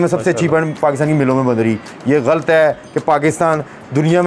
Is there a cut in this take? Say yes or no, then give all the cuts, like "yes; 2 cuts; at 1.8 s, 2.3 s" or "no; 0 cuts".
no; 0 cuts